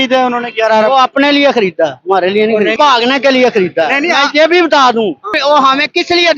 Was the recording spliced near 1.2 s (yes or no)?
no